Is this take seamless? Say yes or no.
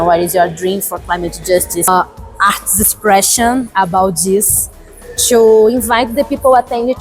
no